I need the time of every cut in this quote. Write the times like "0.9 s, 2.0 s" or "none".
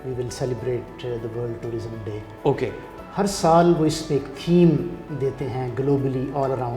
none